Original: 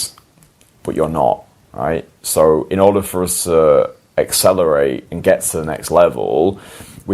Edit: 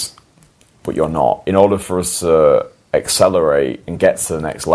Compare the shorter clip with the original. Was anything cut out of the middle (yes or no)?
yes